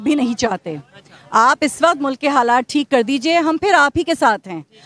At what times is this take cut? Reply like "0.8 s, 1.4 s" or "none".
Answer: none